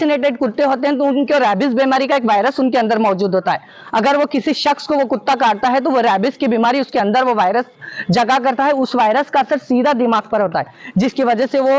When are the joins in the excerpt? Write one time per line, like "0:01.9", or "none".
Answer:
none